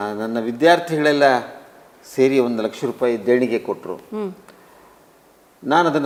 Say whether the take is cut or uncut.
uncut